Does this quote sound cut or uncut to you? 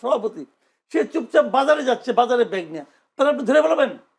uncut